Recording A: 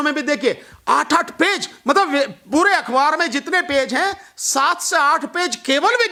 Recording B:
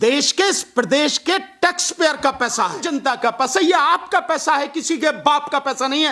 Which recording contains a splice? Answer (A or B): B